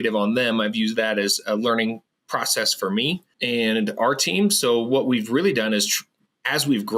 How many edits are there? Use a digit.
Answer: 1